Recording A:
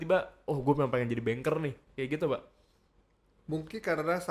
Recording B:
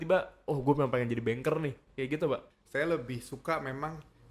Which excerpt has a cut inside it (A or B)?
B